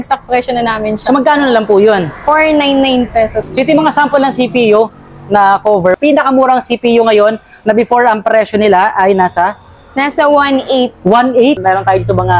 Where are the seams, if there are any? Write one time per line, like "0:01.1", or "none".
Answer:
0:03.4
0:05.9
0:11.6